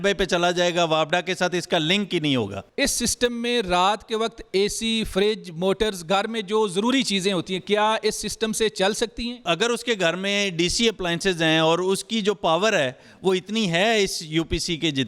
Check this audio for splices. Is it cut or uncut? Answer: cut